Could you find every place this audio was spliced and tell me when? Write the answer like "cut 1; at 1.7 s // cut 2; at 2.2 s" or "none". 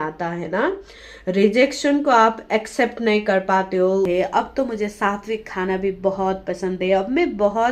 cut 1; at 4.1 s

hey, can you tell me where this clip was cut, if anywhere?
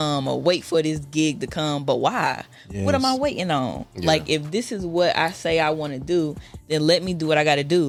none

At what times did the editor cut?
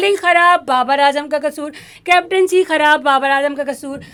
none

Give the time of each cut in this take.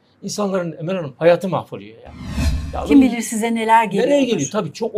none

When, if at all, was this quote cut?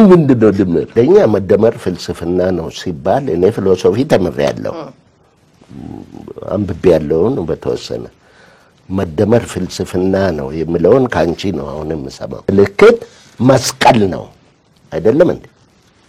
cut 1; at 0.9 s // cut 2; at 12.5 s

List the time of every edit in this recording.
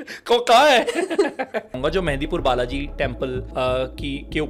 cut 1; at 1.8 s // cut 2; at 3.4 s

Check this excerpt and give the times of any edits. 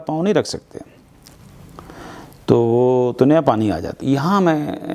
cut 1; at 4.0 s

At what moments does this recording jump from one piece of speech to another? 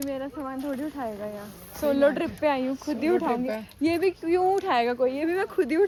none

